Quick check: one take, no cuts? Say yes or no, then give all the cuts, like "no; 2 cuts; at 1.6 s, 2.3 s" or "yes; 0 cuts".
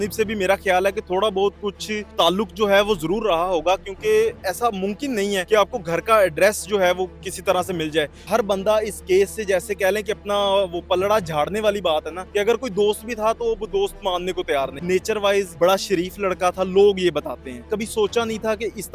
no; 8 cuts; at 2.1 s, 5.4 s, 7.2 s, 8.2 s, 12.2 s, 14.8 s, 15.5 s, 17.7 s